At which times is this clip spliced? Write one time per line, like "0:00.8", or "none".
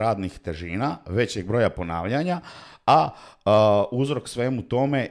none